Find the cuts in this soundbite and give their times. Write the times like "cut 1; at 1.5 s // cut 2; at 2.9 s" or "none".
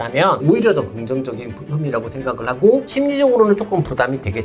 cut 1; at 2.9 s